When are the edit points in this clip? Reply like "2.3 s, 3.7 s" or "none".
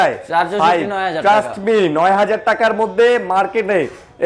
none